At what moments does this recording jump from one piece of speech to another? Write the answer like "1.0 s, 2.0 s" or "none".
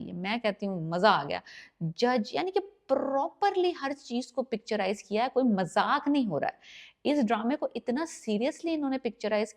none